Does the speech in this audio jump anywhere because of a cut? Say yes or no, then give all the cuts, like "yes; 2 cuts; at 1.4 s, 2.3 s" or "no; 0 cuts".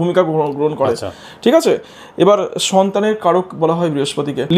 no; 0 cuts